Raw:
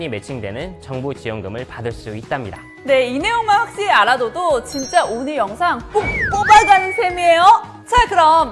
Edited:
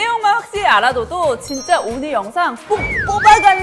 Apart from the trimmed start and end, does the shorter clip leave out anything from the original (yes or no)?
no